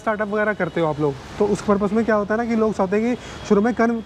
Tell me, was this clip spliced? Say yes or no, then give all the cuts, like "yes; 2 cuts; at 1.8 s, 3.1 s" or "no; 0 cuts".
no; 0 cuts